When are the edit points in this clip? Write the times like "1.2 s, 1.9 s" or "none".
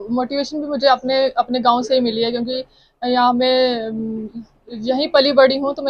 none